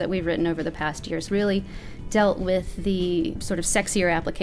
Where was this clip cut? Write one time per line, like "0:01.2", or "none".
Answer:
0:01.2
0:03.4